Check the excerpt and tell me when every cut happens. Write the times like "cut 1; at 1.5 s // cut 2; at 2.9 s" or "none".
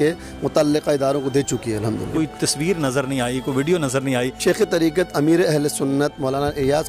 cut 1; at 2.1 s // cut 2; at 4.4 s